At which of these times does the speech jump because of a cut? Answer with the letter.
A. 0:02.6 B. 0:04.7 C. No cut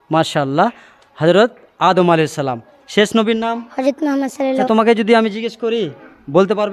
B